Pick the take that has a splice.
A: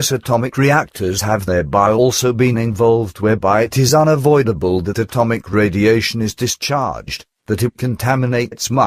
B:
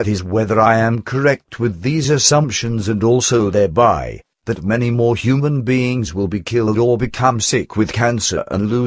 A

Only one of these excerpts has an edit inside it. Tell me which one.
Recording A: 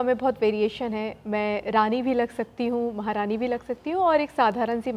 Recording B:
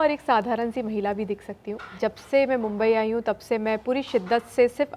B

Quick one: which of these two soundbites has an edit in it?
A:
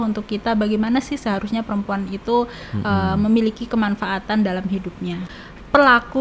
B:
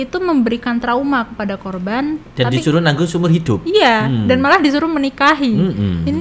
A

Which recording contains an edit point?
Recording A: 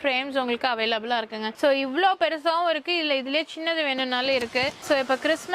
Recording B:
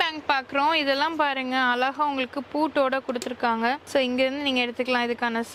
A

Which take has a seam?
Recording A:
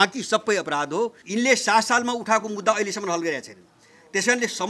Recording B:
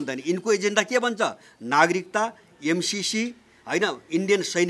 A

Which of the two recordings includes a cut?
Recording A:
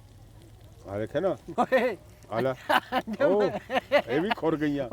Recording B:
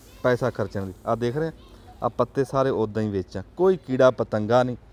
A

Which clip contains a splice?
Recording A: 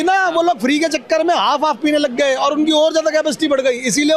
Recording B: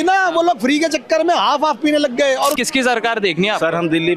B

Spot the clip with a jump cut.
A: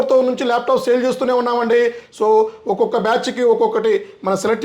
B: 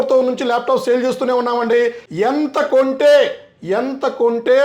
B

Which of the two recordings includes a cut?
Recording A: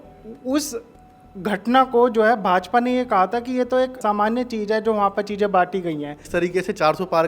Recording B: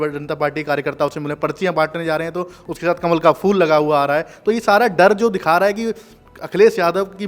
A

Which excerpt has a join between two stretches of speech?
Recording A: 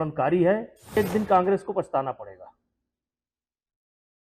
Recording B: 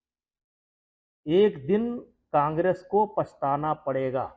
A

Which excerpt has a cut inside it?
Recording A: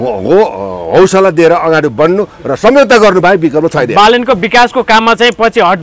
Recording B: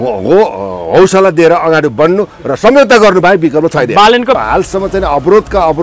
B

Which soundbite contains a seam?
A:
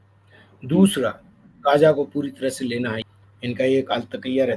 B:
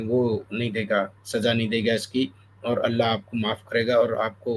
A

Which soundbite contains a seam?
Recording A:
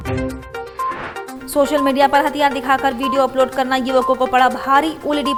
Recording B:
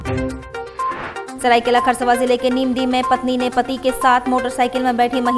B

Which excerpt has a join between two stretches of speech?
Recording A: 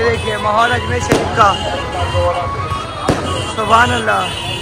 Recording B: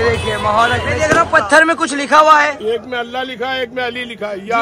B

